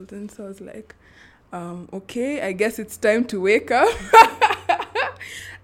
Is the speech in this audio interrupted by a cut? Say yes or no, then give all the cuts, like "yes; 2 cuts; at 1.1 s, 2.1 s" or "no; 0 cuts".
no; 0 cuts